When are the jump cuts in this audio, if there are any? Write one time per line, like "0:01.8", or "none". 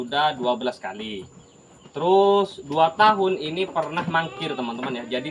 none

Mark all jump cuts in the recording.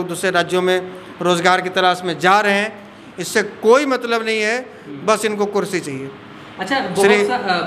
none

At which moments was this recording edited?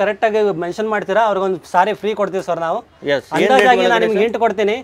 none

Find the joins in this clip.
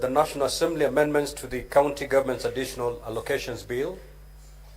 0:02.7

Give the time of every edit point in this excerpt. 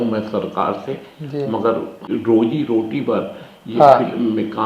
0:02.1

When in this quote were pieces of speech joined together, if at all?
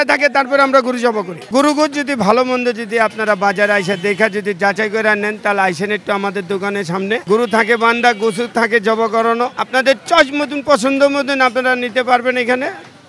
0:01.4
0:07.2
0:09.6

